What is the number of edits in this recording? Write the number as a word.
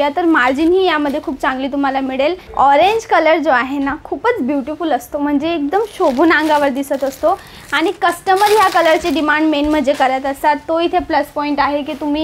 one